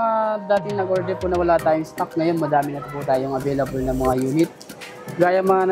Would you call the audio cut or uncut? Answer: uncut